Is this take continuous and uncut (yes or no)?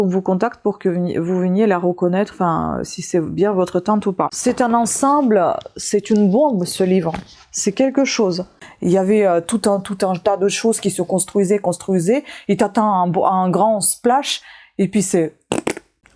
no